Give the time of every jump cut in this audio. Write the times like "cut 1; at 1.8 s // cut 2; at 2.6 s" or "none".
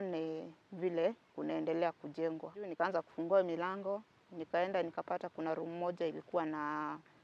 cut 1; at 2.6 s